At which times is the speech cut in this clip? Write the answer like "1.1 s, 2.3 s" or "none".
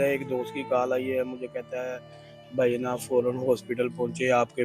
none

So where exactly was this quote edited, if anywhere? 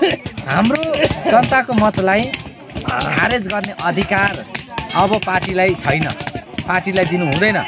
none

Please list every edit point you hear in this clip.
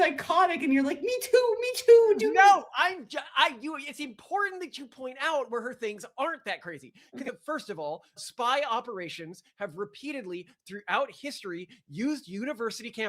7.3 s

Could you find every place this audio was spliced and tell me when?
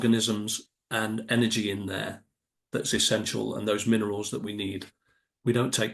none

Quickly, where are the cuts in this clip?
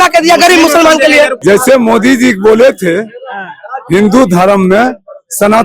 1.4 s

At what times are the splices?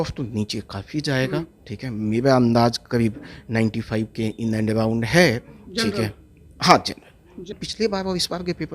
7.5 s

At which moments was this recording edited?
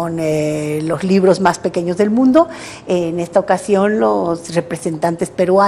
none

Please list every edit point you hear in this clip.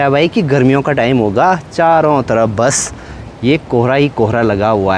none

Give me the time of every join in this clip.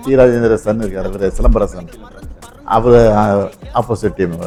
none

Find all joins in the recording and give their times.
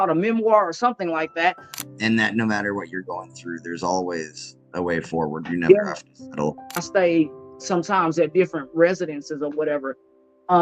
1.8 s, 6.8 s

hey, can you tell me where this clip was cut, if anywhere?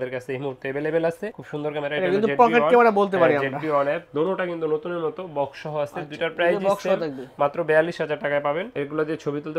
none

